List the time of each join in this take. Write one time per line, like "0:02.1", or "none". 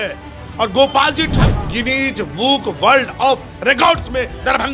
0:01.4